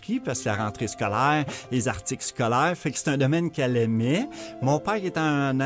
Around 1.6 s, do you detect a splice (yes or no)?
no